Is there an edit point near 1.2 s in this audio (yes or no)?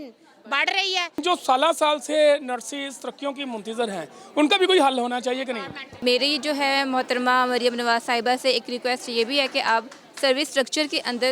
yes